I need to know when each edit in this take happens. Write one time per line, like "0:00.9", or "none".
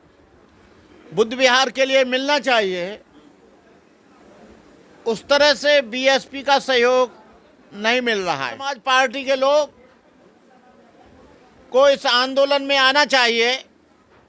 0:08.8